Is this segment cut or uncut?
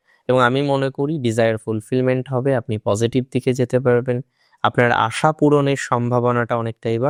uncut